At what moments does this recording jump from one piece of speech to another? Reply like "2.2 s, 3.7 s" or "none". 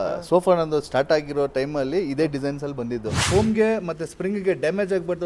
3.2 s